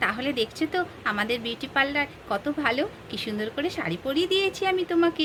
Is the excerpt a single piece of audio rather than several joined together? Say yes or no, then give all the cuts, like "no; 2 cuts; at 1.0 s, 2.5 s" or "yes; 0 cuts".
yes; 0 cuts